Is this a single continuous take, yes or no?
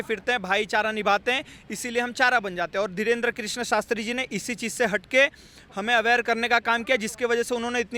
yes